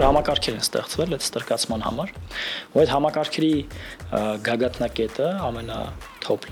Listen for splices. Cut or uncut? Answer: uncut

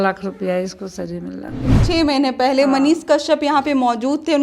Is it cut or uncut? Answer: cut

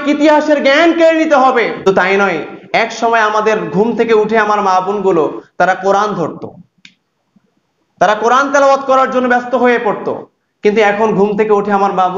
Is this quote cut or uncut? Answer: cut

